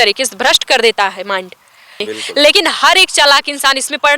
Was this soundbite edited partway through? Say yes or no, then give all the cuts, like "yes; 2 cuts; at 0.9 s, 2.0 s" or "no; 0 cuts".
yes; 1 cut; at 2.1 s